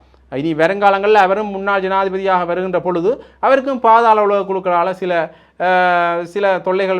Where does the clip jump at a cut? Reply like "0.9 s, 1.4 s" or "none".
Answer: none